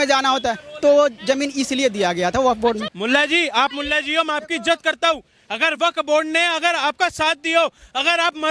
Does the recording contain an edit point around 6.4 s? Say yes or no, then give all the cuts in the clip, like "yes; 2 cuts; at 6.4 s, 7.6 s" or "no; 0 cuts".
no; 1 cut; at 2.9 s